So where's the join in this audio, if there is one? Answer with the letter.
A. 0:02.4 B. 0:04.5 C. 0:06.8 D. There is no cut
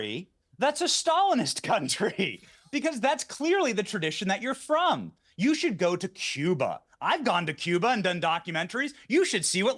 C